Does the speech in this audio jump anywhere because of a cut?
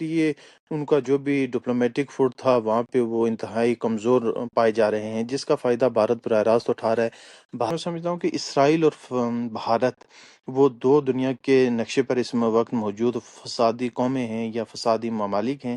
yes; 1 cut; at 7.7 s

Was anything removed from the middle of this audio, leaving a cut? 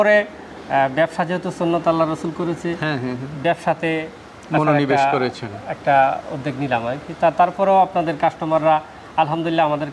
no; 0 cuts

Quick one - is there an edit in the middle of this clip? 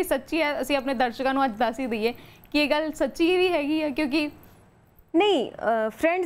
no; 0 cuts

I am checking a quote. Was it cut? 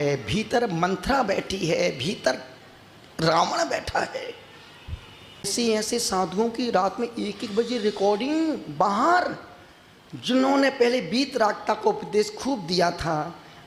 yes; 1 cut; at 5.5 s

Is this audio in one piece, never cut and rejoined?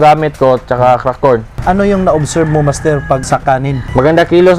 no; 2 cuts; at 1.5 s, 3.6 s

